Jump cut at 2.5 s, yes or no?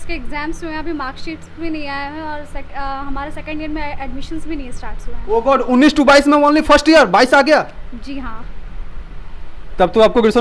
no